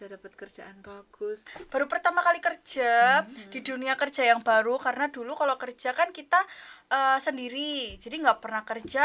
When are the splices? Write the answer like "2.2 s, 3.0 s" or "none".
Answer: 1.5 s